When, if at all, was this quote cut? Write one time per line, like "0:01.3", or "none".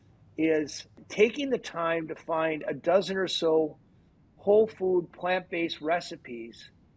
0:01.0